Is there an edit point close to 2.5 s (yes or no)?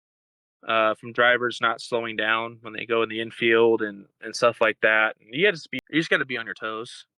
no